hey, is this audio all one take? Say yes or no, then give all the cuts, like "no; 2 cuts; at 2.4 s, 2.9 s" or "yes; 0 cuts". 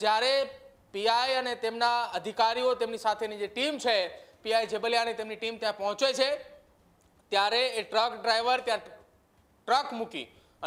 yes; 0 cuts